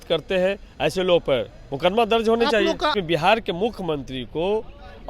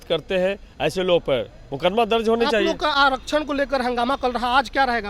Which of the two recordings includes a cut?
first; 1 cut; at 2.9 s

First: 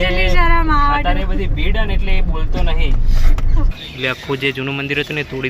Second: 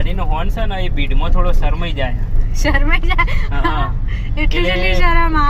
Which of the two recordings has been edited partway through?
first; 1 cut; at 3.7 s

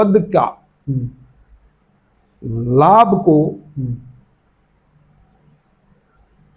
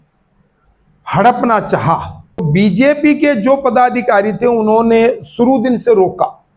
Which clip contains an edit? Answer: second; 1 cut; at 2.4 s

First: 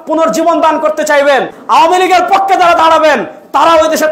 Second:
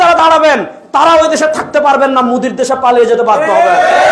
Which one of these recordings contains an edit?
first; 1 cut; at 1.5 s

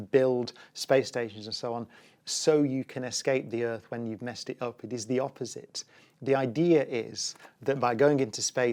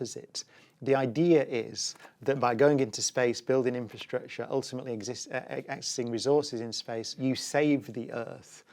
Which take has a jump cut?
second; 1 cut; at 7.2 s

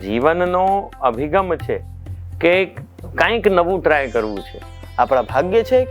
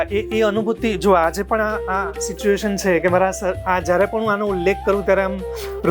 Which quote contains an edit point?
first; 1 cut; at 4.8 s

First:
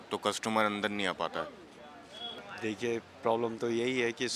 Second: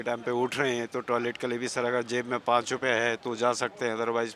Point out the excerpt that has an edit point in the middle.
first; 1 cut; at 2.4 s

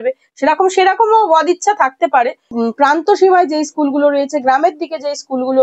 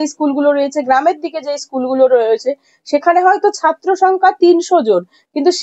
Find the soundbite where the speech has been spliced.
first; 1 cut; at 2.4 s

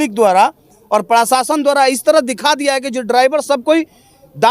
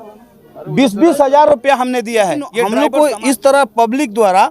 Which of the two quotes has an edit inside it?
second; 1 cut; at 2.7 s

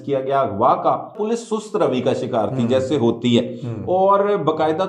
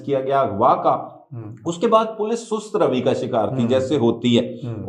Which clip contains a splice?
first; 1 cut; at 1.1 s

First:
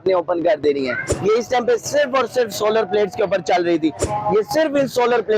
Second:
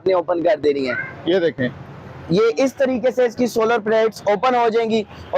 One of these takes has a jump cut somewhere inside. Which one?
first; 2 cuts; at 1.1 s, 4.1 s

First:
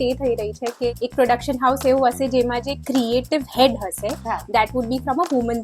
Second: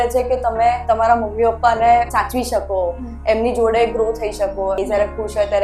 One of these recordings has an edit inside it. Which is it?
second; 3 cuts; at 0.8 s, 2.1 s, 4.8 s

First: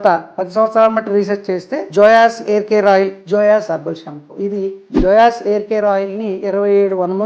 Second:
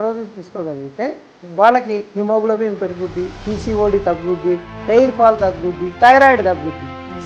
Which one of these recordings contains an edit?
first; 3 cuts; at 1.8 s, 3.2 s, 4.8 s

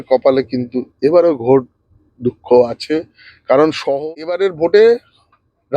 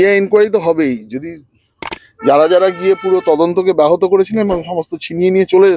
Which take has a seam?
first; 1 cut; at 3.9 s

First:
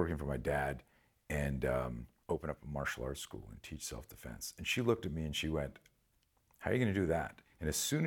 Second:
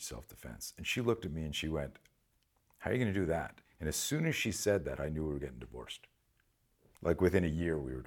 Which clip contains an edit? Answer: first; 1 cut; at 2.1 s

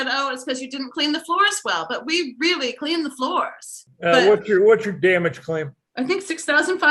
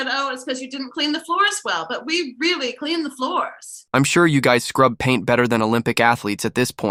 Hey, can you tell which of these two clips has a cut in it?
first; 2 cuts; at 3.8 s, 5.8 s

